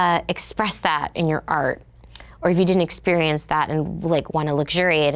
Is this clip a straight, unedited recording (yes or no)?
yes